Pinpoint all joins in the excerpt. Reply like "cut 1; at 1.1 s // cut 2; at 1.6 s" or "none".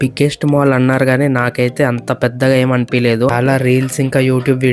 cut 1; at 3.3 s